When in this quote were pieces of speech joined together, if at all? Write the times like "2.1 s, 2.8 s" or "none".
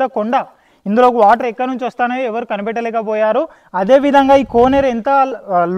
none